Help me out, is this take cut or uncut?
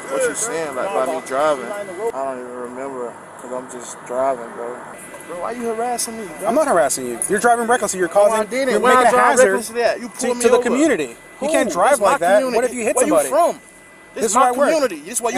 cut